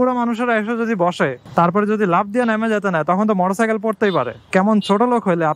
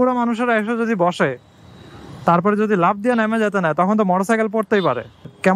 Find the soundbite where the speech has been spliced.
first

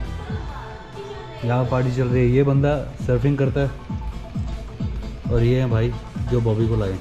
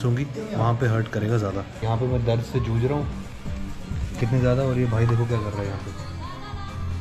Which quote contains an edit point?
second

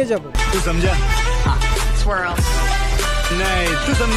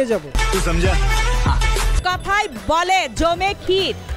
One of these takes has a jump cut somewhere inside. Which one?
second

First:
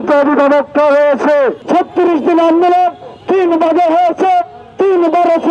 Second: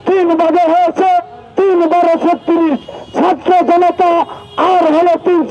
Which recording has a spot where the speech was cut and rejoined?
first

